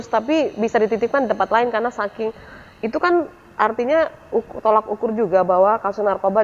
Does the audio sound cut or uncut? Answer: uncut